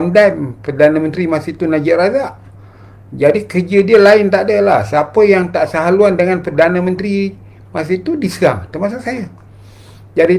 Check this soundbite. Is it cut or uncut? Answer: uncut